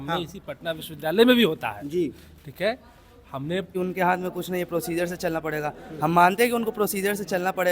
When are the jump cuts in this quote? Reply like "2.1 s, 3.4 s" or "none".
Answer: 3.7 s